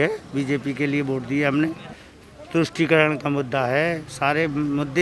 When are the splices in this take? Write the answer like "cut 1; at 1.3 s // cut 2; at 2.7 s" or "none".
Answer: cut 1; at 1.8 s